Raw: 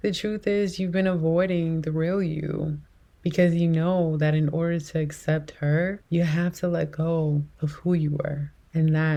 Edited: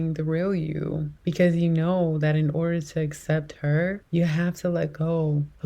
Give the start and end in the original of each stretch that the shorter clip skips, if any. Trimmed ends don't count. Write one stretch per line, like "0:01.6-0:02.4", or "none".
0:02.8-0:03.1